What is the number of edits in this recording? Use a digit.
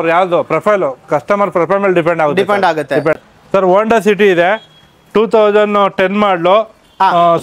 1